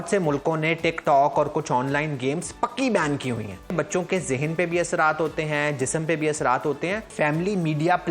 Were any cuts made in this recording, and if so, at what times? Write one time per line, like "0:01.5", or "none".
0:03.7
0:07.1